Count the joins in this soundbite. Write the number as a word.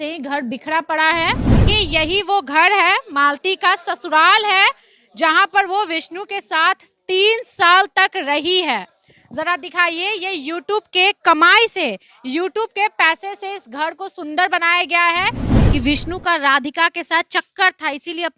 two